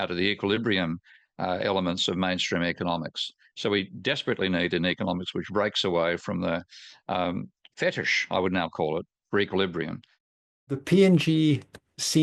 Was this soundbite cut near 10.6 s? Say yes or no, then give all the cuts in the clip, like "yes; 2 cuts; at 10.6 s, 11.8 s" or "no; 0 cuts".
yes; 1 cut; at 10.6 s